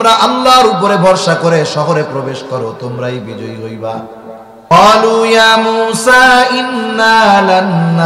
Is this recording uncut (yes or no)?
no